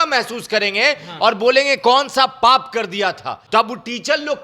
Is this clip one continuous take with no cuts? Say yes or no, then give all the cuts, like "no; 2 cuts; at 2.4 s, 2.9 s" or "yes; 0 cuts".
no; 1 cut; at 3.4 s